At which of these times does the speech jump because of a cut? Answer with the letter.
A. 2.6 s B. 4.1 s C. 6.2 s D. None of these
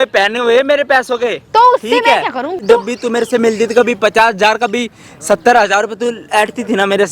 A